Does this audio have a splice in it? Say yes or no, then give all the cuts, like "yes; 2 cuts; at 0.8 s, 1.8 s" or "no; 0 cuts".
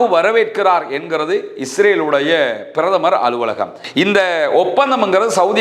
yes; 1 cut; at 3.8 s